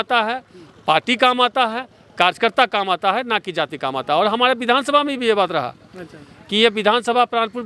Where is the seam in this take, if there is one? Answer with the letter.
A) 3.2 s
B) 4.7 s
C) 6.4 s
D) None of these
D